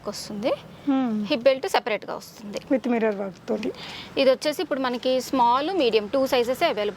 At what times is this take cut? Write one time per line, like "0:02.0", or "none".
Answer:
none